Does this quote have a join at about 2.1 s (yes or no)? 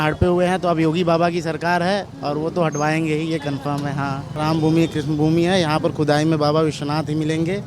no